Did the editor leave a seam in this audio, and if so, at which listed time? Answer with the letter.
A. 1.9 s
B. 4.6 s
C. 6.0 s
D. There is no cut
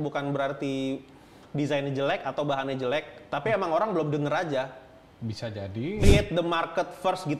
C